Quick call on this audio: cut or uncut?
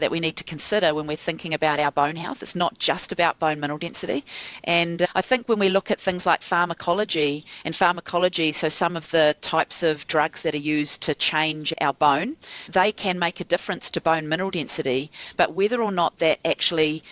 uncut